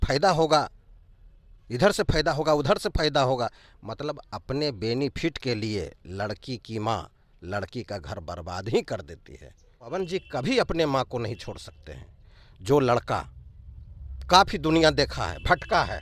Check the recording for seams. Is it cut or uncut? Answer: cut